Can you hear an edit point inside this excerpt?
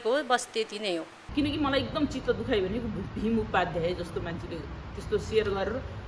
yes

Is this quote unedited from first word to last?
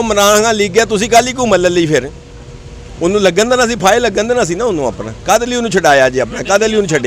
yes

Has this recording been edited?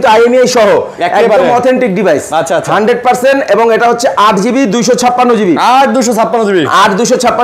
no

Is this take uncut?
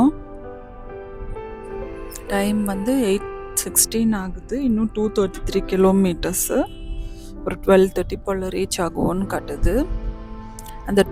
yes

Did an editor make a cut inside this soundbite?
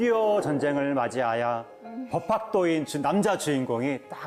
no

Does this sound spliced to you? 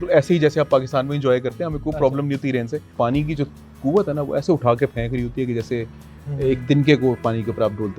yes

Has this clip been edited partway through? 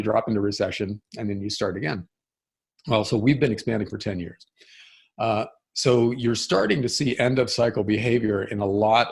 no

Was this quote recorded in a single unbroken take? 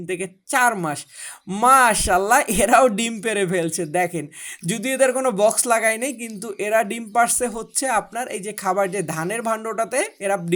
yes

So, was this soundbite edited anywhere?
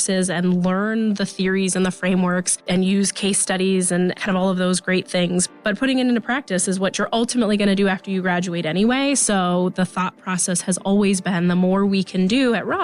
no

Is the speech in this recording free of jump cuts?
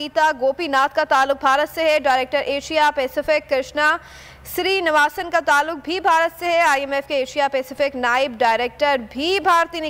yes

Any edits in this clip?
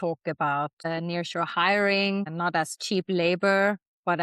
yes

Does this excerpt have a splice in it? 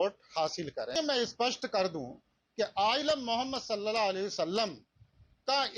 yes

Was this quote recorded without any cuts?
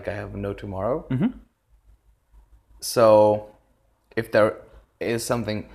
yes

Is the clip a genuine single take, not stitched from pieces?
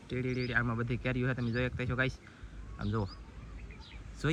yes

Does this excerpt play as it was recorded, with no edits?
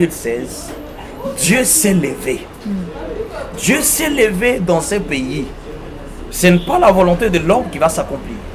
yes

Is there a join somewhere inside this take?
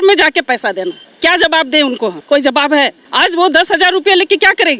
yes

